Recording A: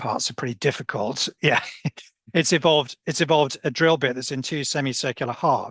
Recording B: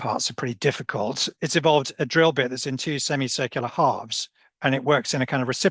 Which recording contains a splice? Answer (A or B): B